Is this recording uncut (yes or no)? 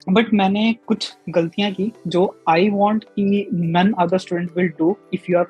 yes